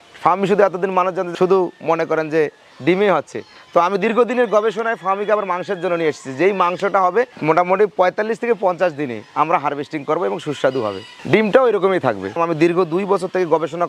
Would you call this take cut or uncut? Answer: cut